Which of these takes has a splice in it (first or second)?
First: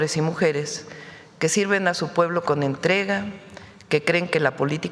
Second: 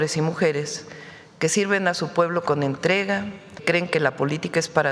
second